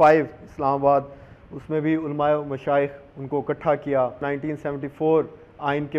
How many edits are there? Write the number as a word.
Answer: one